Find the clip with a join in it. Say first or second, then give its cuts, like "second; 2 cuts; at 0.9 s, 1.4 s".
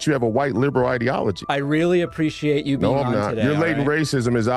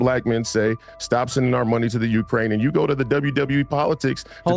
first; 1 cut; at 1.4 s